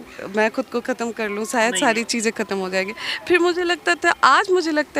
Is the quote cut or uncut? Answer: uncut